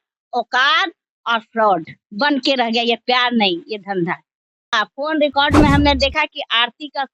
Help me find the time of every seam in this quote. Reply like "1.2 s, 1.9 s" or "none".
4.5 s